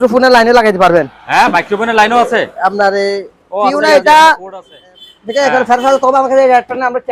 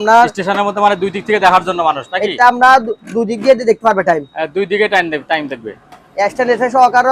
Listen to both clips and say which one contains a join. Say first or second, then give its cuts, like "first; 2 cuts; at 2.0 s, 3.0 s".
first; 1 cut; at 3.7 s